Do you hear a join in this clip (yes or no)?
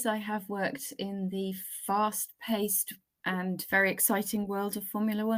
no